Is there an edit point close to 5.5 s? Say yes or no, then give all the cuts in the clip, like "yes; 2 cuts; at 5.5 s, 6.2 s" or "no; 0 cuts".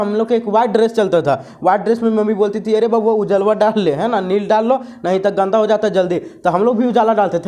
yes; 1 cut; at 5.5 s